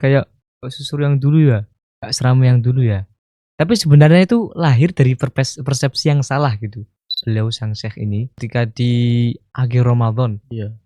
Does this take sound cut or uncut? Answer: cut